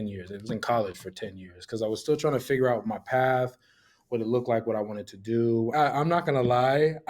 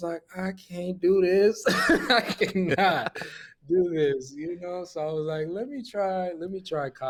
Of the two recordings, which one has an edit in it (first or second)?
first